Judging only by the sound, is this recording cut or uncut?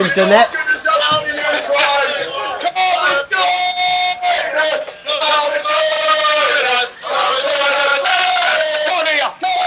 uncut